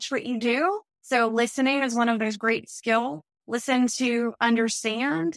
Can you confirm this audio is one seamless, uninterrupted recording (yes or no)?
no